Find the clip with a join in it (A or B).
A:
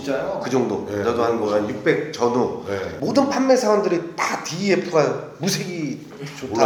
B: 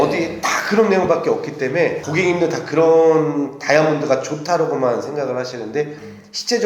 B